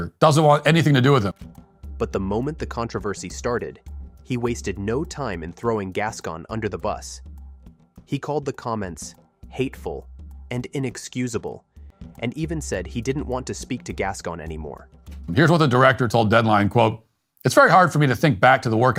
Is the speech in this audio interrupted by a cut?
no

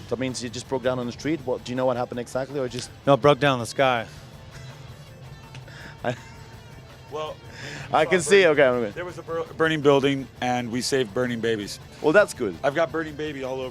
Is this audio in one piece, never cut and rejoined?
no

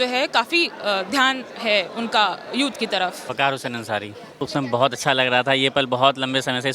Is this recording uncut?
no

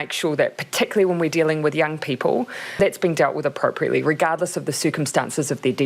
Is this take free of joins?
no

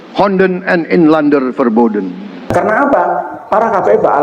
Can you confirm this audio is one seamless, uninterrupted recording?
no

